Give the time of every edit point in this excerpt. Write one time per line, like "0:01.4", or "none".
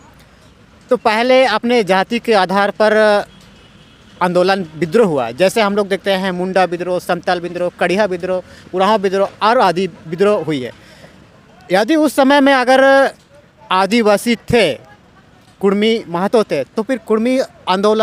none